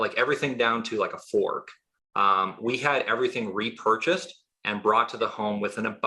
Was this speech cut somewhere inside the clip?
no; 0 cuts

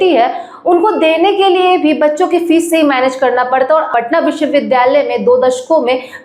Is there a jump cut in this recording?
yes; 1 cut; at 3.9 s

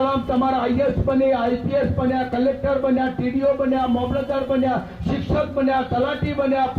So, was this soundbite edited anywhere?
no; 0 cuts

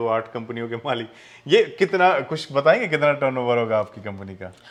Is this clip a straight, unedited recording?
yes; 0 cuts

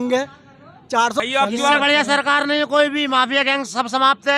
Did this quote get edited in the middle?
yes; 1 cut; at 1.2 s

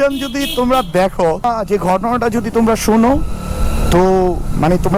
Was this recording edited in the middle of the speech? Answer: yes; 1 cut; at 1.4 s

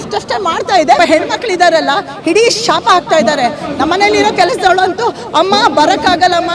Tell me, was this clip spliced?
yes; 1 cut; at 1.0 s

